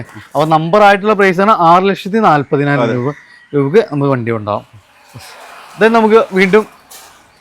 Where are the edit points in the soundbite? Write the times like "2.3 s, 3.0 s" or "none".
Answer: none